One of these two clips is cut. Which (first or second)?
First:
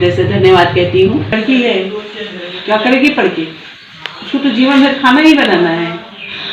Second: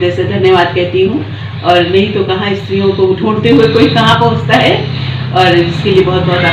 first